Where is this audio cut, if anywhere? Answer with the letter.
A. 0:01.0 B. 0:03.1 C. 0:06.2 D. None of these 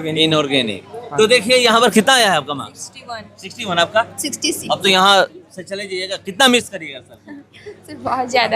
A